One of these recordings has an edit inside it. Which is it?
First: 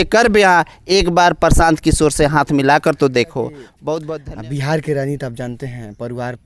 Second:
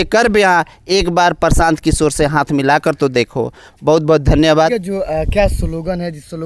first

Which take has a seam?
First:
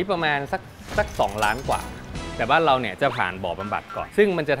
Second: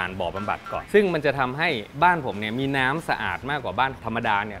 first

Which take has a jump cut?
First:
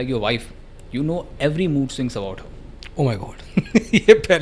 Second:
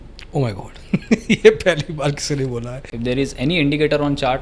second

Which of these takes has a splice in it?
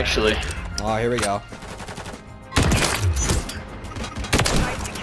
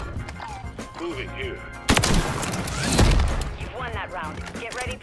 first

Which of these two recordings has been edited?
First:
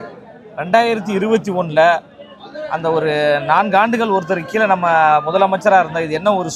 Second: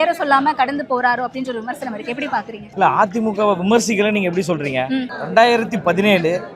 second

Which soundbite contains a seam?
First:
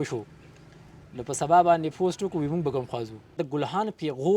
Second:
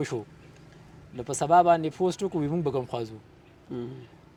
first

